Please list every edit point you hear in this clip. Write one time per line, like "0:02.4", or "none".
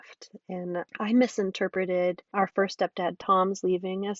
0:00.9
0:02.3